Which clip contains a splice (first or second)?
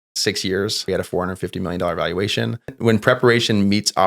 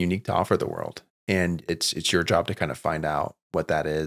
first